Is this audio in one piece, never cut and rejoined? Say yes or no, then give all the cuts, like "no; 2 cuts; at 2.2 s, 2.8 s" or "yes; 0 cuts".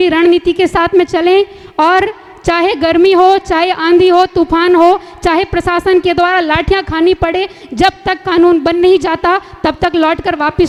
yes; 0 cuts